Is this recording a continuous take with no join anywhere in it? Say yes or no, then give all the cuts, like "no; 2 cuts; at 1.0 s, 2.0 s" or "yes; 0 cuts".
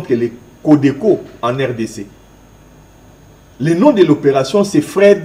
yes; 0 cuts